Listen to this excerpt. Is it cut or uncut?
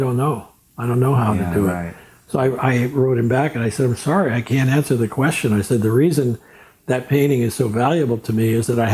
uncut